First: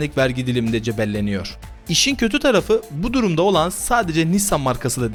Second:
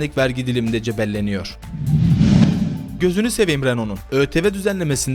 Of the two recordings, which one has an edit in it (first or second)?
second